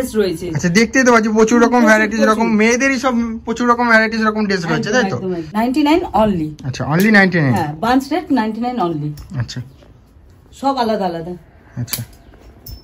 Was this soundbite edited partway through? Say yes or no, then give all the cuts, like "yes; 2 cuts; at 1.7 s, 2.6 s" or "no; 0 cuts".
yes; 1 cut; at 5.5 s